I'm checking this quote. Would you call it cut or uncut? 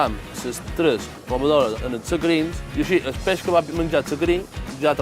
cut